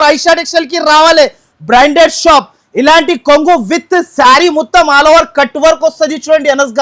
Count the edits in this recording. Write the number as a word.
zero